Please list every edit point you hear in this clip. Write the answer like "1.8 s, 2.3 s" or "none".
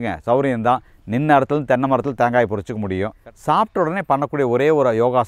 3.2 s